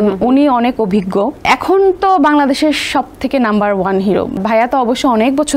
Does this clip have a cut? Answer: yes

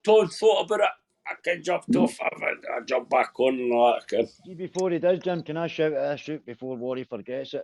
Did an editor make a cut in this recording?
no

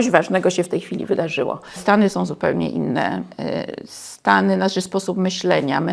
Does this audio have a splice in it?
yes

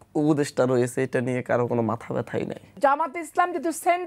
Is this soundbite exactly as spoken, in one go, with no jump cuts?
no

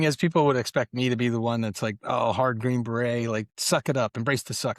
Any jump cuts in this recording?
no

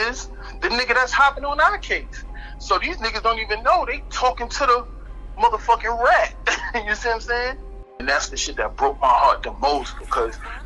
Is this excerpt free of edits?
no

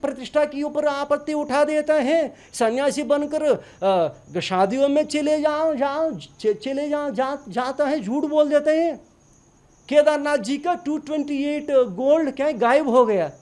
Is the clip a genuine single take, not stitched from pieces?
yes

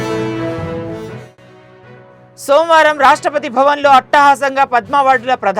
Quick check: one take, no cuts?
no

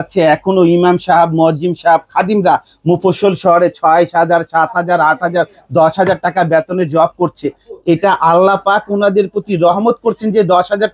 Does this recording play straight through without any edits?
yes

